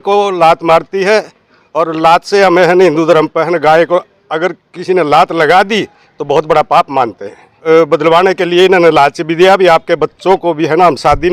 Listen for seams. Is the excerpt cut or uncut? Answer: cut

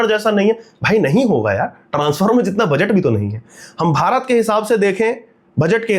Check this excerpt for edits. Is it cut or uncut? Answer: uncut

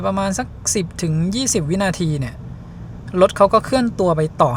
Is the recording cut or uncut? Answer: uncut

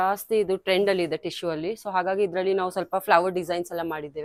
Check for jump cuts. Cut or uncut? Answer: uncut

